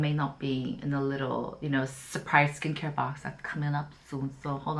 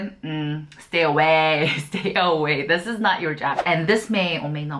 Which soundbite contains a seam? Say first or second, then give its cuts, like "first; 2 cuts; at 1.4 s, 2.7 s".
second; 1 cut; at 3.6 s